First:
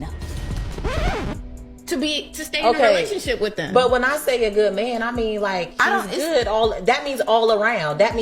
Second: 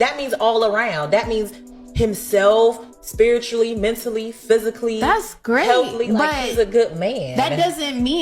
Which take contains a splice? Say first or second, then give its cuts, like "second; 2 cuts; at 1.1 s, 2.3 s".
first; 1 cut; at 4.2 s